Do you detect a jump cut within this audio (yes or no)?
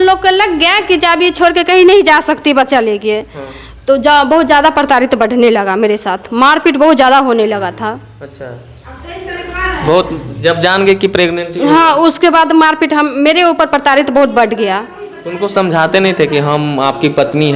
no